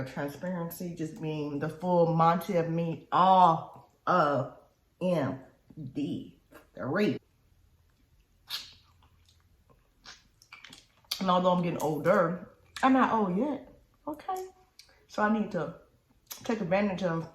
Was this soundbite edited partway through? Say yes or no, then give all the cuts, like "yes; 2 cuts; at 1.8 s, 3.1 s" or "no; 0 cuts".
yes; 1 cut; at 7.3 s